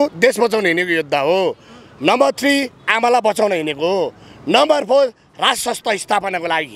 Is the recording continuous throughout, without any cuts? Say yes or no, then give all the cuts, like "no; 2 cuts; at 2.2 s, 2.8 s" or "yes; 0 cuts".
yes; 0 cuts